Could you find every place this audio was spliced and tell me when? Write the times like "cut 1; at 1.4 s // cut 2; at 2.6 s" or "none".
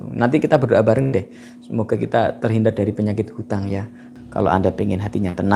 cut 1; at 4.1 s